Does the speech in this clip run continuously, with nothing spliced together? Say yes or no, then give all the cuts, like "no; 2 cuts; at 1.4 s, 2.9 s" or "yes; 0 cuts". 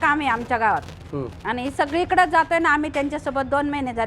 yes; 0 cuts